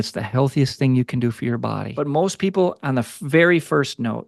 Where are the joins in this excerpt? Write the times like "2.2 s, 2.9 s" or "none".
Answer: 1.9 s